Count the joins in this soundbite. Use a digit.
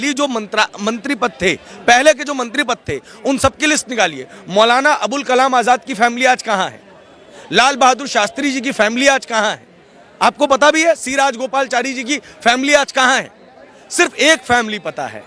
0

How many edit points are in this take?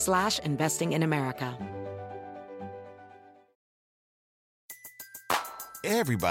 1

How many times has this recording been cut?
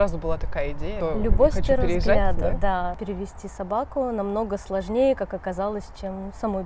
2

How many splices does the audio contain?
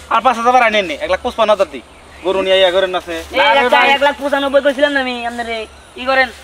0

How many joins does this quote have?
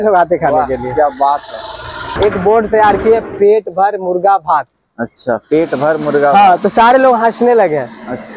1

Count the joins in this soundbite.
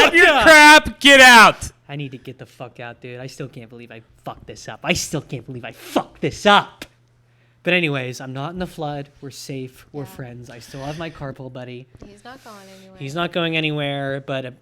0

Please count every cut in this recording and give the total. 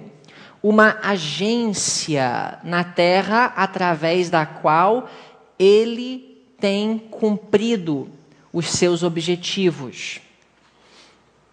0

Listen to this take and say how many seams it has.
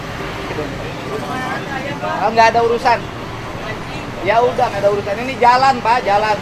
0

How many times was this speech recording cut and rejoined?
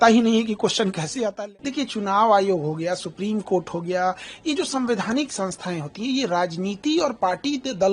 1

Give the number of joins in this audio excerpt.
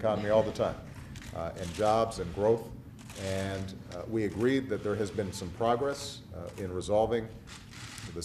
0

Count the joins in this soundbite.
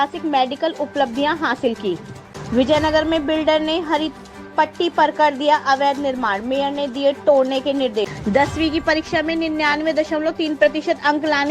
2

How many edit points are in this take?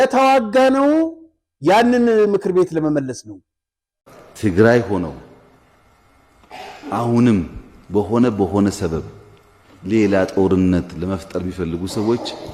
1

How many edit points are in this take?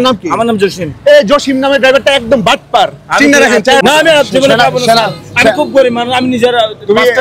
1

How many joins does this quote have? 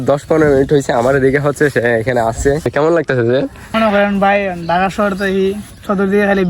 2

